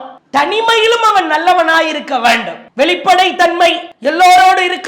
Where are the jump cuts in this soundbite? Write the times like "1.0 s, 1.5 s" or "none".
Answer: 2.6 s, 3.9 s